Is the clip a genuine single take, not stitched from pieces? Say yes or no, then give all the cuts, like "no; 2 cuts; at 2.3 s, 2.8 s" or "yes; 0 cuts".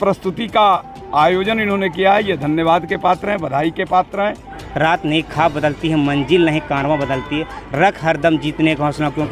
no; 1 cut; at 4.6 s